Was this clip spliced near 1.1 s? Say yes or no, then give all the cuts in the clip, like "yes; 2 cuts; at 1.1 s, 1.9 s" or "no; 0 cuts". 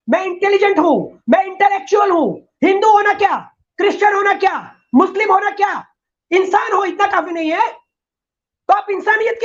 no; 0 cuts